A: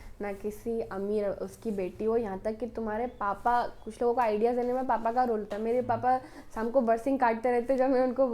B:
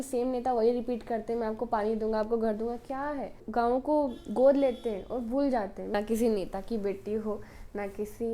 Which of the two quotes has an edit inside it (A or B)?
B